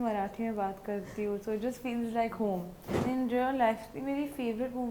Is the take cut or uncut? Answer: cut